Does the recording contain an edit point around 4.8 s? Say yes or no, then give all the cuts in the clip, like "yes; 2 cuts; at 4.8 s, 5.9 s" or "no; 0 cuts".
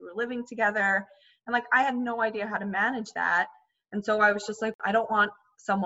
yes; 1 cut; at 4.8 s